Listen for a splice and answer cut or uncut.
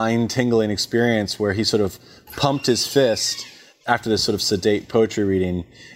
uncut